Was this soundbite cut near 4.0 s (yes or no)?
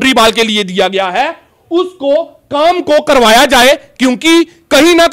no